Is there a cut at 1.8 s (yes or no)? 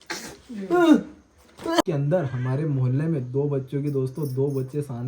yes